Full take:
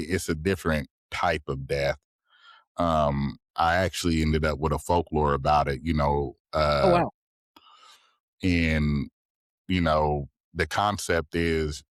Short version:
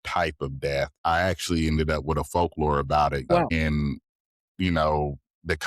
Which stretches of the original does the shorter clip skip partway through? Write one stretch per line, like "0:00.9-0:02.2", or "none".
0:02.0-0:03.5
0:06.0-0:08.6

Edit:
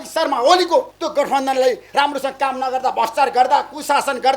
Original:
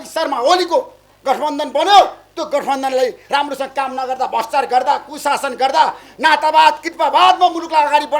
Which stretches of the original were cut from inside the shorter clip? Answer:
0:01.0-0:02.3

